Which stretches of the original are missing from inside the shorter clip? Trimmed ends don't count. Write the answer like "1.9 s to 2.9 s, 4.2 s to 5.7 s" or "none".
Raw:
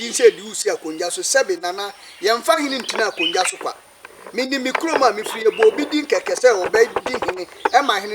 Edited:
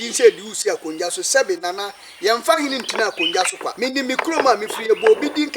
3.7 s to 4.3 s